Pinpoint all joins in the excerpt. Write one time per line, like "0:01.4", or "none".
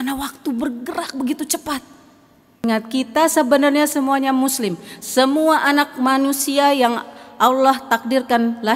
0:02.6

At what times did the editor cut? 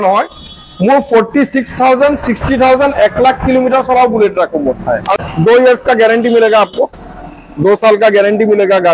0:05.1

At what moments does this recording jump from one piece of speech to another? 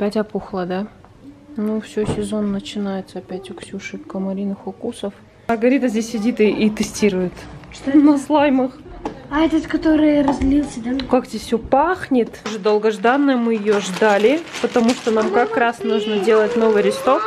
0:05.5
0:12.6

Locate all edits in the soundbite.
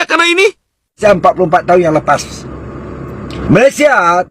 0:01.0
0:03.3

